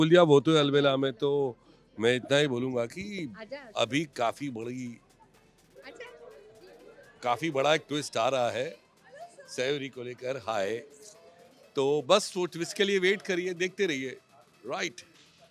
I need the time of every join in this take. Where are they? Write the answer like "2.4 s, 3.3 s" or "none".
none